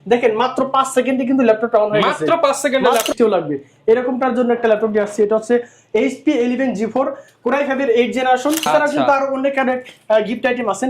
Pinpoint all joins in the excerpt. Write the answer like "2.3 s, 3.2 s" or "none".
3.1 s, 8.7 s